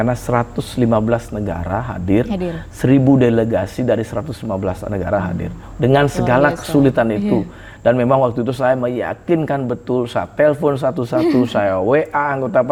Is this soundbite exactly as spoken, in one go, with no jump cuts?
yes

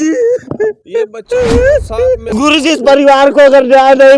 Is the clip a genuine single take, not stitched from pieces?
no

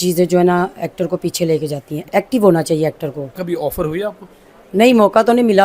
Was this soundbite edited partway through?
yes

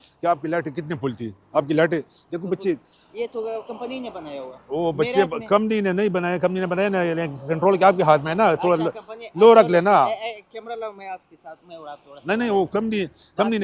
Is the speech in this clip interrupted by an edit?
no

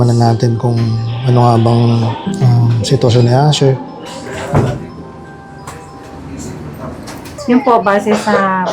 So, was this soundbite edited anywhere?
yes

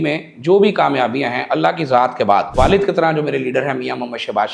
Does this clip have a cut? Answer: yes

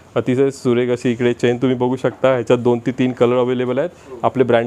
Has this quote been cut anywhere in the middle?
no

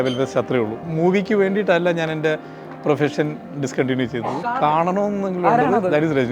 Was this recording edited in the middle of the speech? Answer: yes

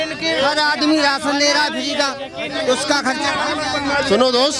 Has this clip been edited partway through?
no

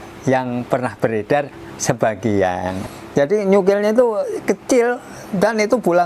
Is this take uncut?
no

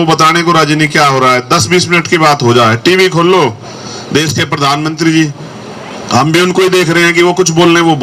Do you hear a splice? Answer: no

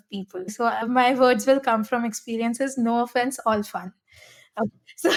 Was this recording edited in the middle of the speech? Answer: no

